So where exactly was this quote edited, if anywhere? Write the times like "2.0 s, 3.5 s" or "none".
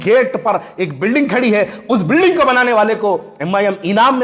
none